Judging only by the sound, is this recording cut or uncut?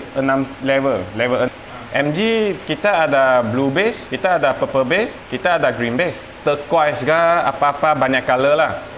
cut